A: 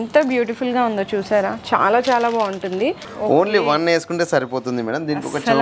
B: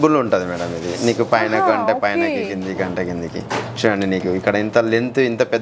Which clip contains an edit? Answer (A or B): A